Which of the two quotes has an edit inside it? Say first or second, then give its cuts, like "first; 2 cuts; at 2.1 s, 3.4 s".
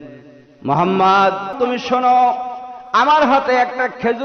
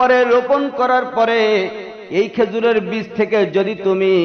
first; 1 cut; at 1.5 s